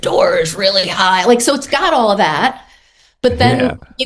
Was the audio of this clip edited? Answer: no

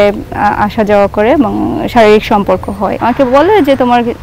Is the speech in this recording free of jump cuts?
no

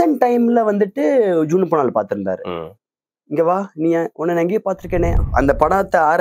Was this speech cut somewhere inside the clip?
yes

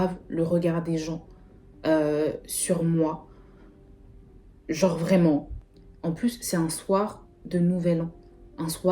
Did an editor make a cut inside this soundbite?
yes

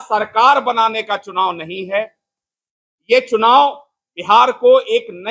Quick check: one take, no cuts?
yes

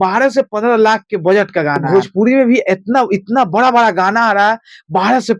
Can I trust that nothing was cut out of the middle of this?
no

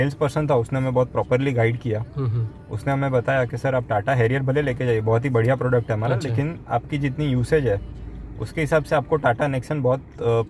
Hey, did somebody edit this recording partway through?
no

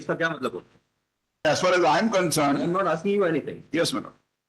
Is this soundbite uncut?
no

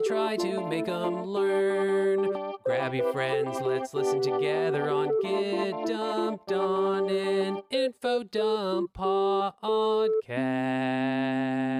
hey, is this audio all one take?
yes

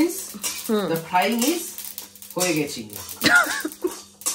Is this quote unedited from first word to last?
yes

